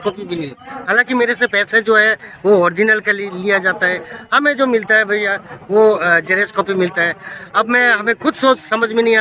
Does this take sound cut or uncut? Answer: uncut